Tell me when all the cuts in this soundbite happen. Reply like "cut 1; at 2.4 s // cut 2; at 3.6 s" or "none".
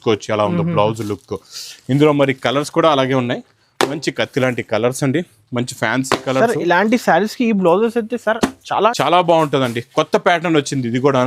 cut 1; at 8.9 s